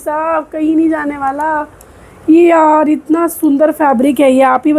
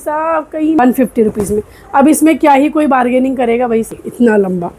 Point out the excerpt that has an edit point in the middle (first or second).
second